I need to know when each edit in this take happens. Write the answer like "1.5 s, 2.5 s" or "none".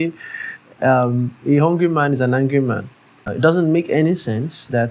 3.4 s